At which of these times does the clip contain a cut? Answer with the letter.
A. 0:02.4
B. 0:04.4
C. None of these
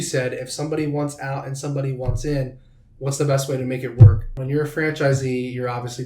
B